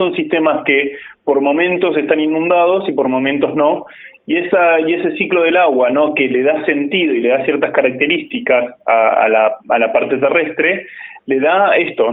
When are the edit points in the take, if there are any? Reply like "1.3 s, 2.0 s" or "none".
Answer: none